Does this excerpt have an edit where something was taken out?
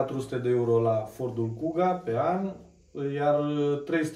no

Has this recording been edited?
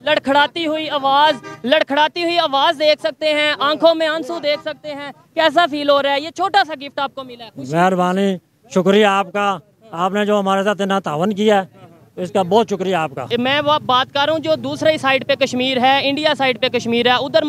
yes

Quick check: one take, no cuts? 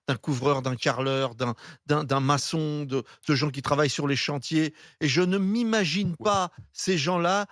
yes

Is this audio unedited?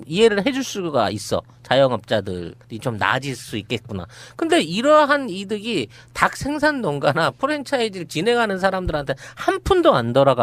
no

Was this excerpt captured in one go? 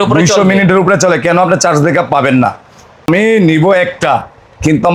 no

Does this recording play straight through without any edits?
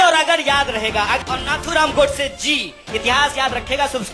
no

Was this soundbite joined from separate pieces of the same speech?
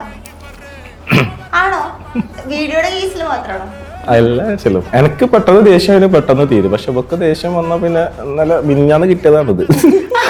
no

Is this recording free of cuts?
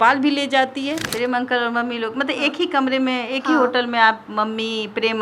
no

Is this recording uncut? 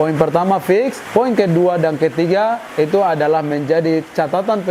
no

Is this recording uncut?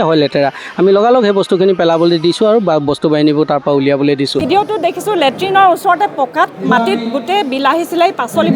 no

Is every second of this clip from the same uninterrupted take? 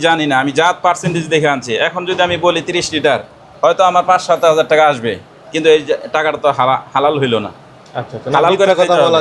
yes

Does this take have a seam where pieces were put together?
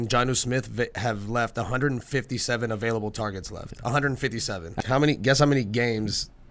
yes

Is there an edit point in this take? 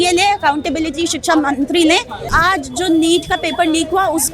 yes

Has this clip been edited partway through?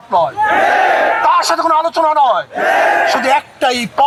no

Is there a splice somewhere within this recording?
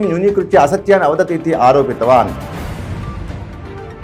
no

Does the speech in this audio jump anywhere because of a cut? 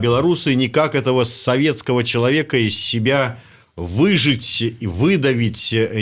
no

